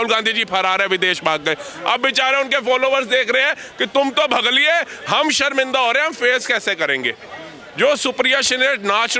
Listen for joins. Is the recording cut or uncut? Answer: uncut